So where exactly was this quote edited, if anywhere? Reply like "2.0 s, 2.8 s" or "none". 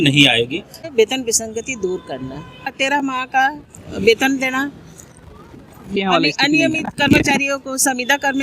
0.9 s, 5.9 s